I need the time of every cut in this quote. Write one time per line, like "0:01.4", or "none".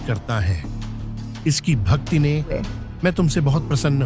0:02.5